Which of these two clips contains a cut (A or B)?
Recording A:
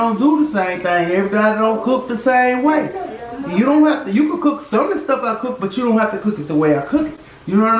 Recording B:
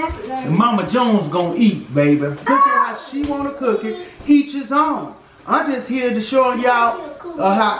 B